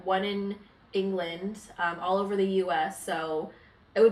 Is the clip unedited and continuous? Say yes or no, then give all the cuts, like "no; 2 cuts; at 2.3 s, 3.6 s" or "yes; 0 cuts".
yes; 0 cuts